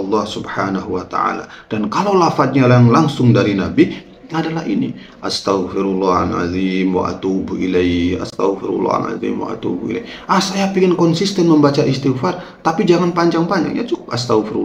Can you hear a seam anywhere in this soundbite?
no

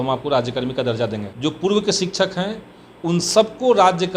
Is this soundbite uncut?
no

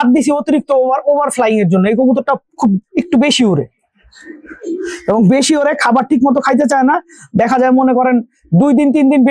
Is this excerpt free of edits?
yes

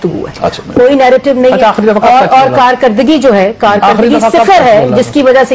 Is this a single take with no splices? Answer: yes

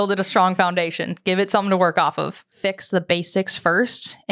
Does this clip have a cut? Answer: yes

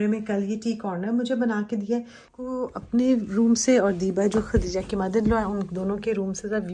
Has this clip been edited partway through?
yes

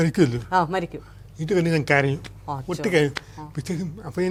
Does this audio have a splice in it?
no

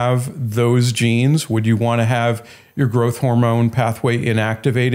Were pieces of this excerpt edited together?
no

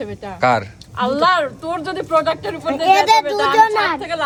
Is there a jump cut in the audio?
no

